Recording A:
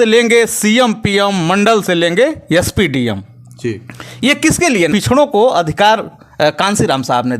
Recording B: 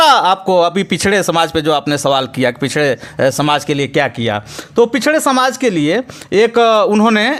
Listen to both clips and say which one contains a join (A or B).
A